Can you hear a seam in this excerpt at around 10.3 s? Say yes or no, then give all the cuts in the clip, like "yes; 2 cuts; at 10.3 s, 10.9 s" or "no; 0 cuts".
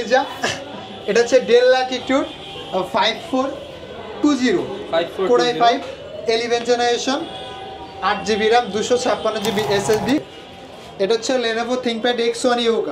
yes; 1 cut; at 10.3 s